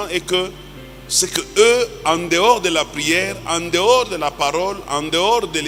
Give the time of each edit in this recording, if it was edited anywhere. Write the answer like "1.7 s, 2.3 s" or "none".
none